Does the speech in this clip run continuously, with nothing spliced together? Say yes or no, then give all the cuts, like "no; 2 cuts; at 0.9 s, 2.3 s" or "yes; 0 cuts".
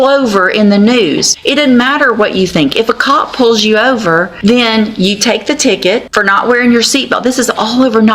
no; 3 cuts; at 1.3 s, 4.3 s, 6.1 s